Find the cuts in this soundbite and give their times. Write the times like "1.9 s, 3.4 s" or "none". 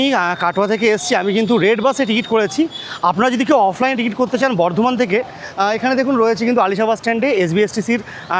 none